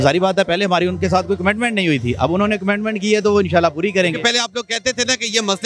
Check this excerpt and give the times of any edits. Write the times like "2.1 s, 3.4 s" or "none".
none